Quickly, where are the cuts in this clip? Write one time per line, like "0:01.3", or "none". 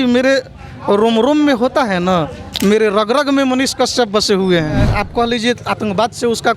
0:05.0